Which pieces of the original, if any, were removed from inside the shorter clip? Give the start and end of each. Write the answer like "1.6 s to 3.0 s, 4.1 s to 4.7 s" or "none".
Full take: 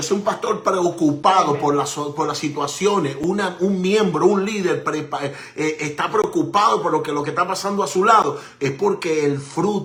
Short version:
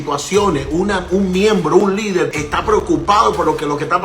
4.8 s to 5.8 s